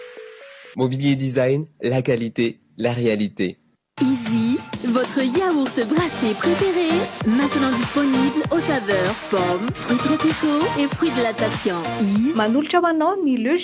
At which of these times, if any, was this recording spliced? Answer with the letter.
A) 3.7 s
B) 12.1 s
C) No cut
A